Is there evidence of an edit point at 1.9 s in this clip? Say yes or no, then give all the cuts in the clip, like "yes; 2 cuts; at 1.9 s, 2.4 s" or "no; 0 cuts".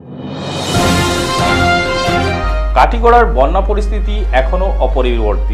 yes; 1 cut; at 1.9 s